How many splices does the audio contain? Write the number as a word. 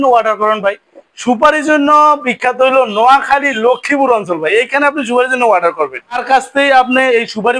one